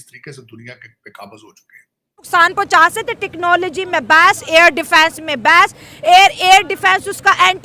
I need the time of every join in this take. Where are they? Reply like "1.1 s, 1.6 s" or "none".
2.3 s